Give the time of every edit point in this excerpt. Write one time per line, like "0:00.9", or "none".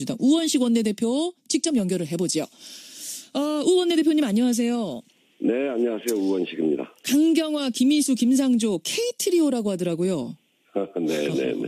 0:03.9